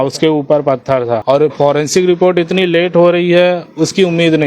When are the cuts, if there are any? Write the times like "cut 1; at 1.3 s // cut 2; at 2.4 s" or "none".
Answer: cut 1; at 1.2 s